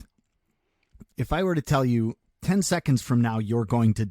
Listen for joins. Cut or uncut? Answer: cut